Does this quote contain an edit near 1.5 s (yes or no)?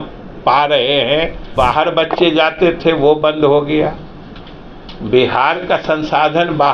yes